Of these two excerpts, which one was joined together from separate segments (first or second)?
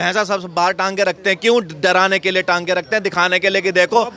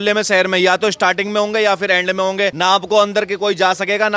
second